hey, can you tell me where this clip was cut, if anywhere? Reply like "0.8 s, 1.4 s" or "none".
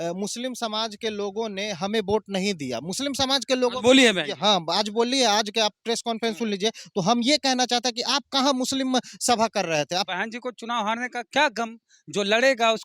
10.1 s